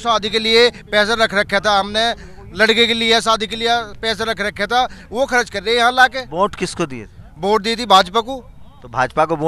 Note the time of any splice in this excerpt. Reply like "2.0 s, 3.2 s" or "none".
none